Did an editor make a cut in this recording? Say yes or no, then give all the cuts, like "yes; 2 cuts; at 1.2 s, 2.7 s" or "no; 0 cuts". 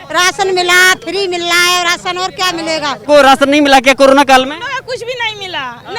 yes; 1 cut; at 3.0 s